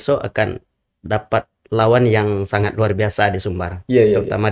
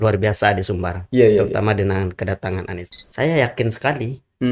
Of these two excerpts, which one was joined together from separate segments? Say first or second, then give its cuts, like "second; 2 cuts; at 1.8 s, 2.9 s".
second; 1 cut; at 2.8 s